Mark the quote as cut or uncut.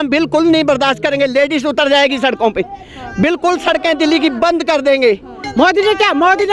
cut